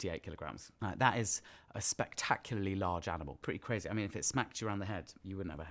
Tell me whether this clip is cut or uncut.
uncut